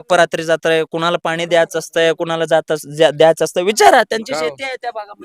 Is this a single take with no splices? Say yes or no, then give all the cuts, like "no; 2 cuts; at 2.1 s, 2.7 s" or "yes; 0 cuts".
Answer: yes; 0 cuts